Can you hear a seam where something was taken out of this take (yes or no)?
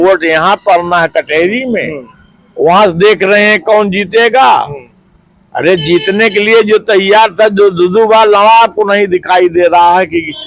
no